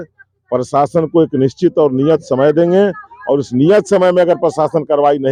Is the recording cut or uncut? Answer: uncut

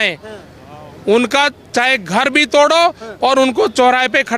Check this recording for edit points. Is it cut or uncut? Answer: uncut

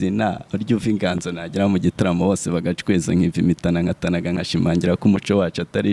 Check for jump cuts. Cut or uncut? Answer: uncut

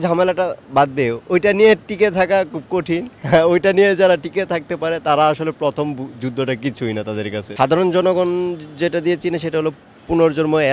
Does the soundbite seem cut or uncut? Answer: cut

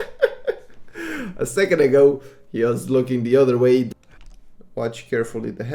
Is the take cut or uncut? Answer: cut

